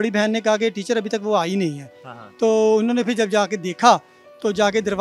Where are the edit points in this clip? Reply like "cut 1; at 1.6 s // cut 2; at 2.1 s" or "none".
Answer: none